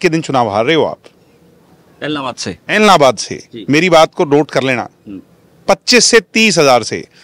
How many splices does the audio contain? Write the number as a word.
zero